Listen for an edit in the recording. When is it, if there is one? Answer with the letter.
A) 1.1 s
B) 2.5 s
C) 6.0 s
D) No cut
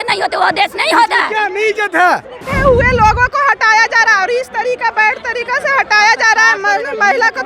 B